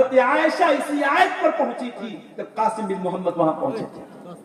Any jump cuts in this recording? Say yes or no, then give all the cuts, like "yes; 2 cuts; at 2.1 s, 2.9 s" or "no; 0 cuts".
no; 0 cuts